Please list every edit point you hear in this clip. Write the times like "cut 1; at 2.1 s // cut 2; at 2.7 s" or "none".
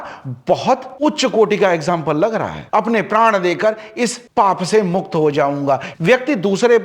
cut 1; at 2.6 s // cut 2; at 5.9 s